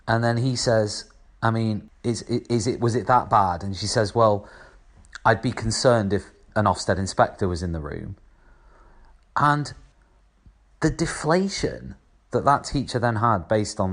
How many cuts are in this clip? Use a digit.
1